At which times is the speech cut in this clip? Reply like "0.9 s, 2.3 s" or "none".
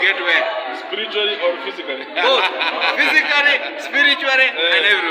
none